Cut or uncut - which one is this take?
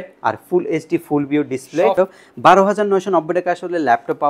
cut